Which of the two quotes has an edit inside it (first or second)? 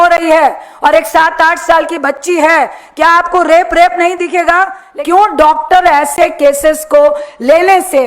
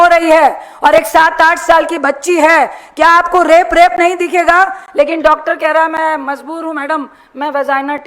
first